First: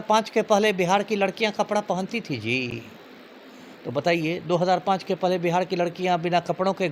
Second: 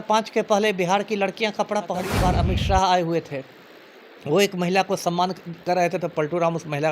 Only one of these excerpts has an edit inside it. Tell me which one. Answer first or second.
second